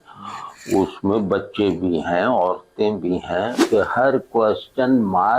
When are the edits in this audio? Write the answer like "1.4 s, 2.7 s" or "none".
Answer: 3.6 s

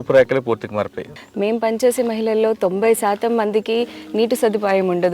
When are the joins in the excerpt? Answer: 1.1 s

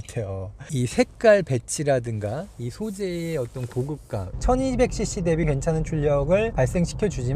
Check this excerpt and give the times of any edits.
4.3 s, 5.5 s

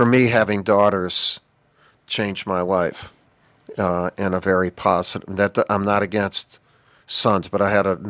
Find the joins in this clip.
none

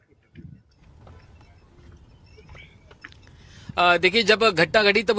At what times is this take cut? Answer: none

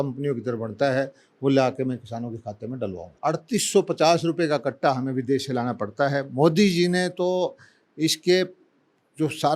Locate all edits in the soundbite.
3.0 s

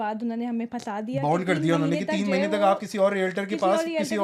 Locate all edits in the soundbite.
none

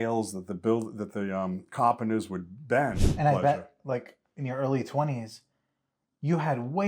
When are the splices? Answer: 3.0 s

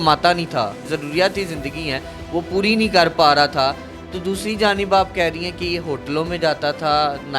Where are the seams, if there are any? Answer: 0.9 s

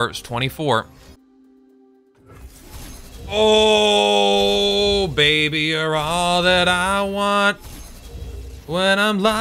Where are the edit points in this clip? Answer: 1.2 s

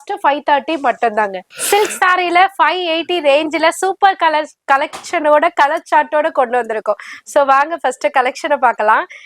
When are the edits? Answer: none

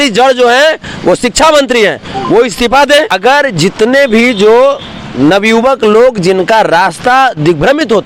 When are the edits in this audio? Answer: 3.2 s

